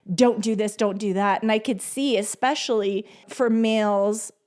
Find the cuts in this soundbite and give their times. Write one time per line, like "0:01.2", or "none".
0:03.2